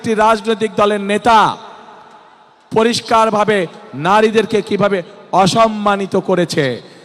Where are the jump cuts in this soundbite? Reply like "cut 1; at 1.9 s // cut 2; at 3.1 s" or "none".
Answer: none